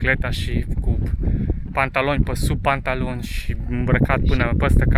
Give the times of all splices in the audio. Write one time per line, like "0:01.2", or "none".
none

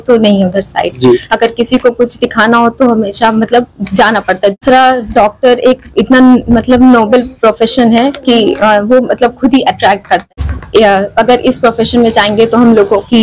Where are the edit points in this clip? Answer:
0:04.6
0:10.3

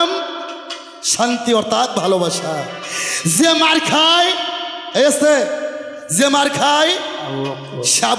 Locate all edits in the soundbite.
none

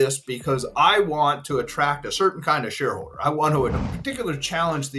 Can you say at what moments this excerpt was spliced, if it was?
0:03.8

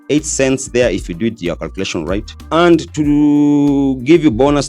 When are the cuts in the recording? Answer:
0:02.4

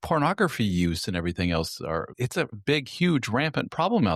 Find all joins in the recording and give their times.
0:02.6

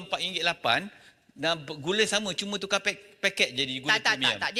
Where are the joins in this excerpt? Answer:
none

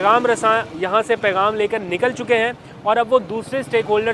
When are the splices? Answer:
none

